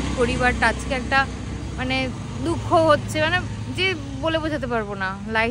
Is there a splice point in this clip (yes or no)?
no